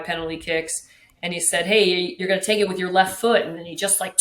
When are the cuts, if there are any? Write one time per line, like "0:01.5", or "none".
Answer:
0:02.2